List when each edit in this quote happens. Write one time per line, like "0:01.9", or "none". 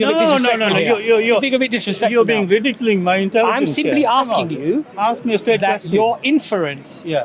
none